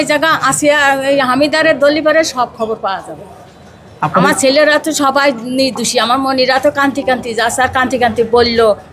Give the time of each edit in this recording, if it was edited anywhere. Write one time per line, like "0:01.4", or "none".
none